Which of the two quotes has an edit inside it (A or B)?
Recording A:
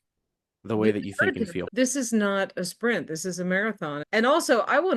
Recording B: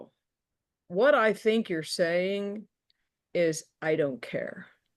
A